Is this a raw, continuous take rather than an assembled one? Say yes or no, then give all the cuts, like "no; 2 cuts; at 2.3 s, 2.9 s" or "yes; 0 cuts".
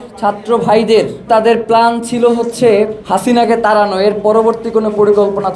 no; 2 cuts; at 1.3 s, 3.0 s